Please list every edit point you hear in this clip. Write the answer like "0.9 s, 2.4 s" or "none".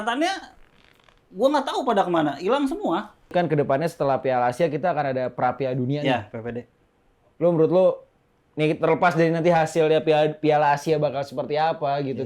3.3 s